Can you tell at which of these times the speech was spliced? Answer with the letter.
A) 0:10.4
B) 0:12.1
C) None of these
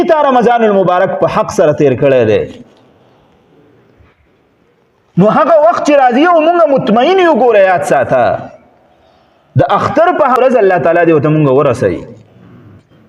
A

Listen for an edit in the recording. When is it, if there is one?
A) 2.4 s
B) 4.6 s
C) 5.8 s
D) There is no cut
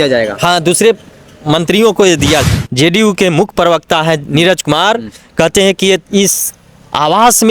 A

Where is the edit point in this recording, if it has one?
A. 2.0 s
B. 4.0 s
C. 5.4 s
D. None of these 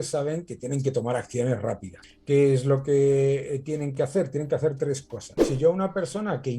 C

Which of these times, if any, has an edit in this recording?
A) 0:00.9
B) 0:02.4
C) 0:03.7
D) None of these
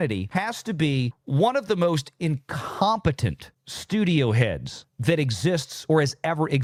D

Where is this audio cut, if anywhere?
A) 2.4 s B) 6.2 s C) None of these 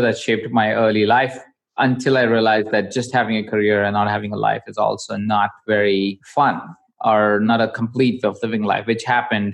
B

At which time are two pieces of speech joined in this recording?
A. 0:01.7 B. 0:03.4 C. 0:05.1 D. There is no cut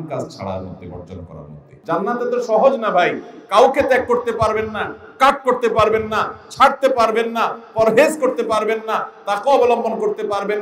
A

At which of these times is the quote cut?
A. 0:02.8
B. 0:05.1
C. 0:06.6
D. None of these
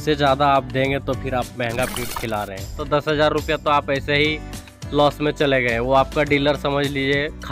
A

